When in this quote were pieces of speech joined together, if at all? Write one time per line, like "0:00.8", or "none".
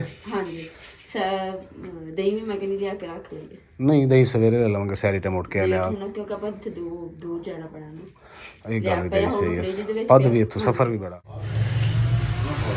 0:11.0